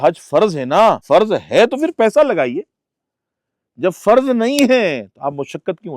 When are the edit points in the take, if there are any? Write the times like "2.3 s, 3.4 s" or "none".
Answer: 1.0 s

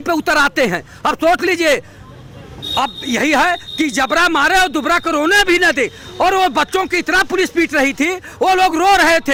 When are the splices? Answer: none

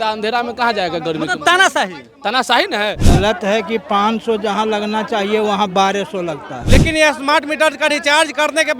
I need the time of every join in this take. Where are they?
3.0 s, 6.5 s

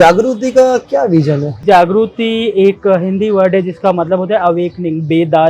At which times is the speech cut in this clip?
1.6 s

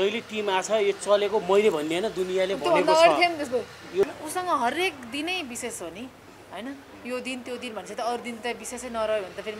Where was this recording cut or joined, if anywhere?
4.1 s

